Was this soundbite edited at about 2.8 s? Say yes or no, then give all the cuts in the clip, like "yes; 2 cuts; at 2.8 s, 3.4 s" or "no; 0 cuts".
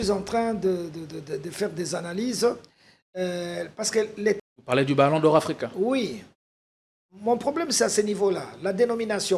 no; 1 cut; at 4.5 s